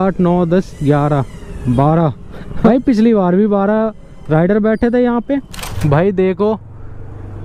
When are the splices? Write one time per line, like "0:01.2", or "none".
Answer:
0:02.7
0:05.8